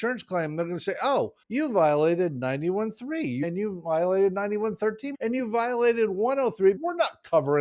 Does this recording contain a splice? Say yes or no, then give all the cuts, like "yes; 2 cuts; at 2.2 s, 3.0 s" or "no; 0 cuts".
yes; 4 cuts; at 1.4 s, 3.4 s, 5.1 s, 6.8 s